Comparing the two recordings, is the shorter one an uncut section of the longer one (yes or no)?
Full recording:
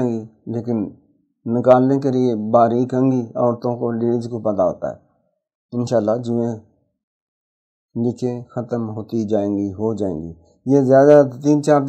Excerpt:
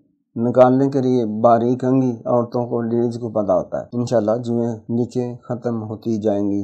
no